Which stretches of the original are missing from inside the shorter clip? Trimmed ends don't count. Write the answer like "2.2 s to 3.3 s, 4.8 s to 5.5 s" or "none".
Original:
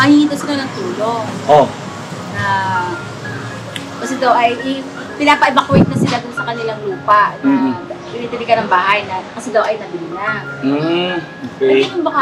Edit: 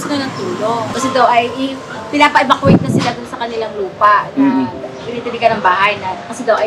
1.3 s to 4.0 s